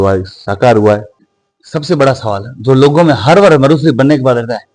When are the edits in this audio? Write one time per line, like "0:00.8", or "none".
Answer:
0:01.2